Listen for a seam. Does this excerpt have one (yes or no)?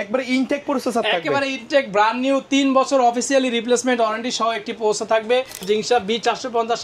yes